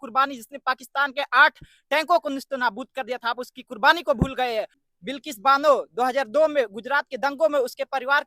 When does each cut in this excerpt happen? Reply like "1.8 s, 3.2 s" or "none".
4.8 s